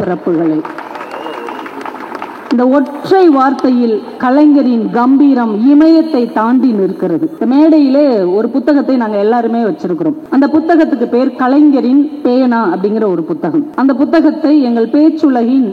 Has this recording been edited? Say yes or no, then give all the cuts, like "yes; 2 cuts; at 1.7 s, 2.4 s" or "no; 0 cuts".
yes; 3 cuts; at 7.3 s, 10.2 s, 13.7 s